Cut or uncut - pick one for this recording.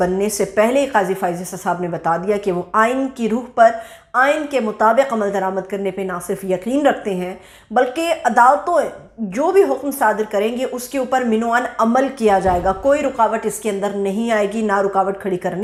uncut